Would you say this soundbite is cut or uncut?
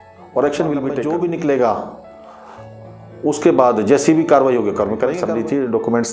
cut